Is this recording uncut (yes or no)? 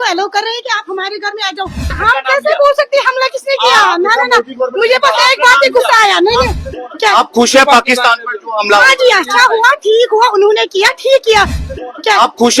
no